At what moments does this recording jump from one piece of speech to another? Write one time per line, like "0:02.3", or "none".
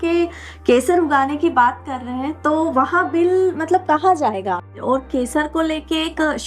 0:04.7